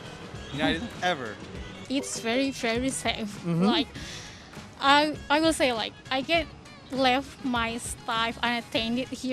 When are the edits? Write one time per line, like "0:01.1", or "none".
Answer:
0:01.7